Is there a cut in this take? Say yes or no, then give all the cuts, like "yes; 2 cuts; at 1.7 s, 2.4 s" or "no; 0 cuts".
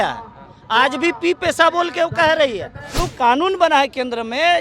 yes; 1 cut; at 3.0 s